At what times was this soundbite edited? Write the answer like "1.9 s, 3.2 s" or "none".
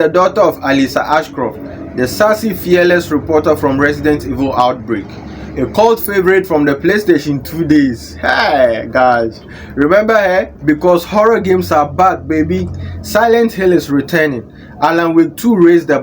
10.5 s